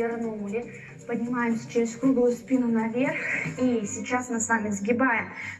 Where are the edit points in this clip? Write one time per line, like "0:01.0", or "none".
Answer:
none